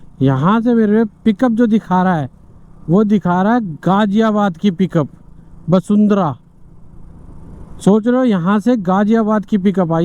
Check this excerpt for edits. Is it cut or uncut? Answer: uncut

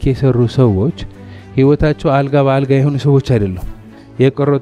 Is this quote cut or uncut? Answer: uncut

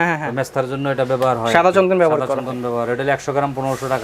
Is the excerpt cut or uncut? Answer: uncut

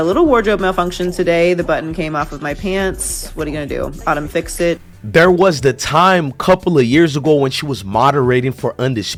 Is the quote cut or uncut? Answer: uncut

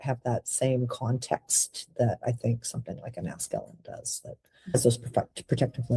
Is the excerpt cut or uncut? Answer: uncut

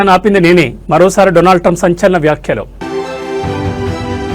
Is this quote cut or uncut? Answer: cut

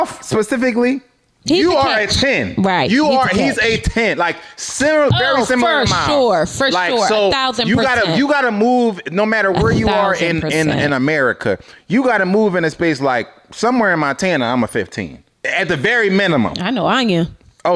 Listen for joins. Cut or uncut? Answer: uncut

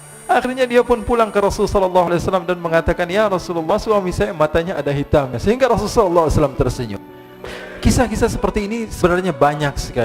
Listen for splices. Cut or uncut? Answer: cut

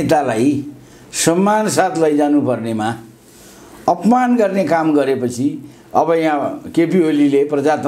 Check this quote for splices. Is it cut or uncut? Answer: uncut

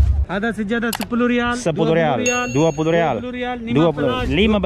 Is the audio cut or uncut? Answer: uncut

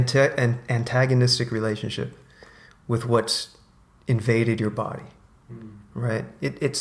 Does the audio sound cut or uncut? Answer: uncut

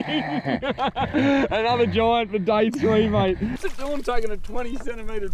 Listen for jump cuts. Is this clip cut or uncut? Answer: cut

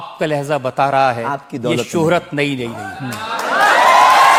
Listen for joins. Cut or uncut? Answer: uncut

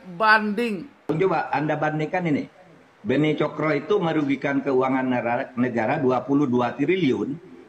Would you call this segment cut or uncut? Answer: cut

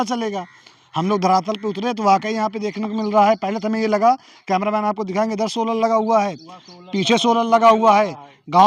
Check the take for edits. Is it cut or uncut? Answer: uncut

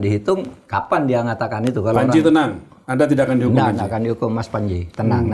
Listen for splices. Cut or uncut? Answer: uncut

